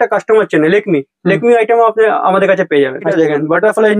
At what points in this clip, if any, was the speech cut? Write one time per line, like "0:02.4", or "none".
0:03.1